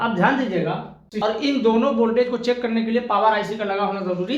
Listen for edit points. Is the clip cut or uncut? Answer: cut